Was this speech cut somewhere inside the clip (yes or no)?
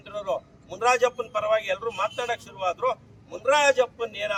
no